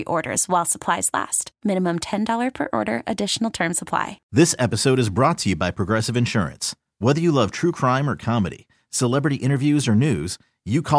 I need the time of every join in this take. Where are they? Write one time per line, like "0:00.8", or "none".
0:04.2